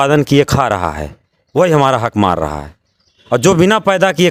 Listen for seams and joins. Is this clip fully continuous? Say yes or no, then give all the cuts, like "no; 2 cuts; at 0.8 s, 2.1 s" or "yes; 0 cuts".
yes; 0 cuts